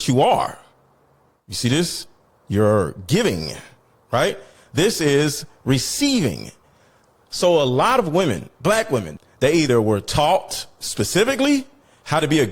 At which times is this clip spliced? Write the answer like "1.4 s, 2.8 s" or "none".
9.1 s